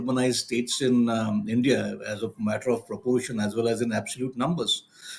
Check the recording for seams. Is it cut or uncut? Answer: uncut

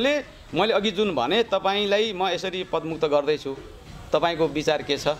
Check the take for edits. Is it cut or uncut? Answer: uncut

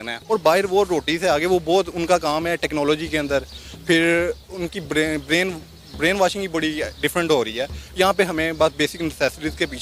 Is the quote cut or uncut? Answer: uncut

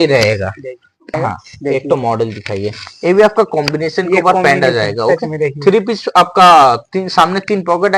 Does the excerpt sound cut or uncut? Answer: cut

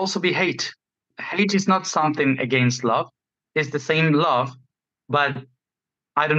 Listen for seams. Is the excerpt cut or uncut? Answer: cut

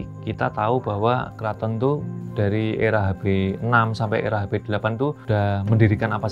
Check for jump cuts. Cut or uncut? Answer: cut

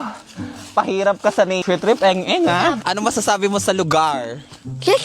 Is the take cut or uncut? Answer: cut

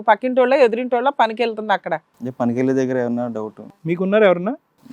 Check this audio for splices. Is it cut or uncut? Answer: cut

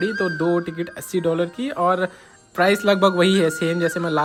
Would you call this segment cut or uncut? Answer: uncut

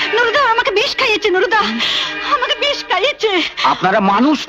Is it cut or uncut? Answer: uncut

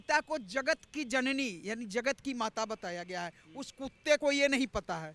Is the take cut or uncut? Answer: uncut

